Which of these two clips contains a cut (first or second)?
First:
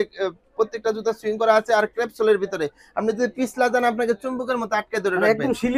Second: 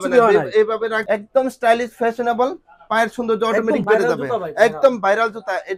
second